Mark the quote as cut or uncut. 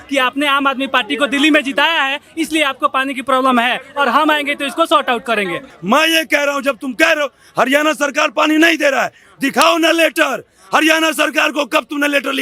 cut